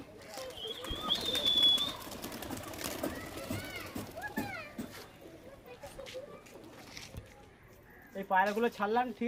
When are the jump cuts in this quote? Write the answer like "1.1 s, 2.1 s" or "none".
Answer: none